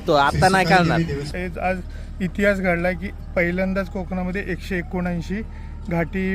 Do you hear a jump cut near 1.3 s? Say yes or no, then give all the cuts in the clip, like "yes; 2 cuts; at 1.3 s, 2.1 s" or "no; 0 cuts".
yes; 1 cut; at 1.3 s